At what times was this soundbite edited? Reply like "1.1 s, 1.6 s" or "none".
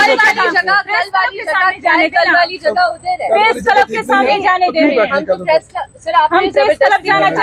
none